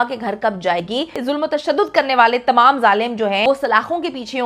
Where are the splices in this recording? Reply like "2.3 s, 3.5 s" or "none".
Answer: 1.2 s, 3.4 s